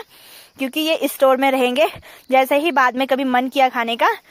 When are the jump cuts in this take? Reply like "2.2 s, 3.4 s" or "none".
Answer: none